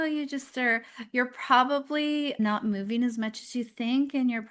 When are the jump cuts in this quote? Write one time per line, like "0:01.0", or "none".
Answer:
0:02.4